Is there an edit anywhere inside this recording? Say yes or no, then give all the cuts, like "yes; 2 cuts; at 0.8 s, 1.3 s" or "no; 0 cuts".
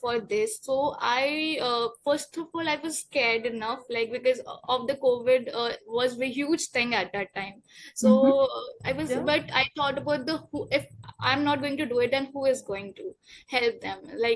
no; 0 cuts